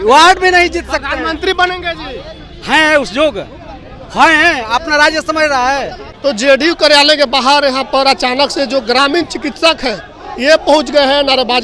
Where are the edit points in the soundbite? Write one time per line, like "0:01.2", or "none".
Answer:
0:06.1

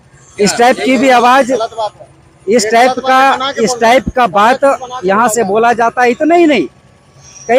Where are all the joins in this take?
none

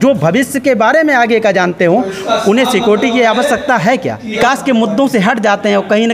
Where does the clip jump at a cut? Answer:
0:04.4

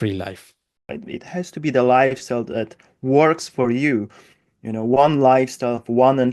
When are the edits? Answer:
0:00.9

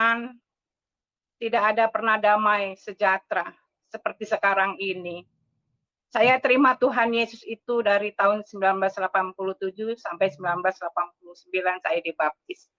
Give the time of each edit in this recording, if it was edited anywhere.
none

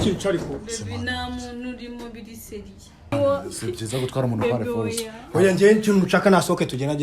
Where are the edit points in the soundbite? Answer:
0:03.1

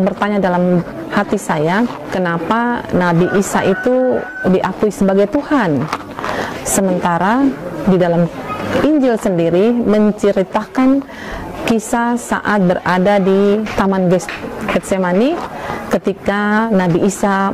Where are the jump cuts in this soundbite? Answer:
0:02.1
0:04.3
0:13.7

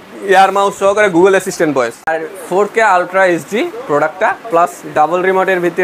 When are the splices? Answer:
0:02.1

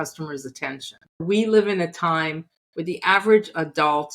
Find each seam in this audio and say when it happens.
0:01.2

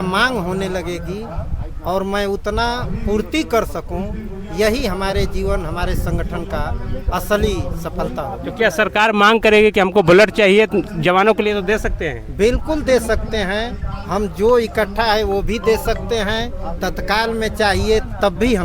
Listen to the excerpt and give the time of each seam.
none

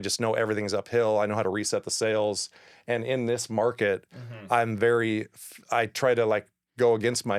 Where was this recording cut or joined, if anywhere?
none

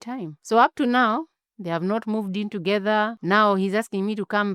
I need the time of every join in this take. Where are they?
0:03.2

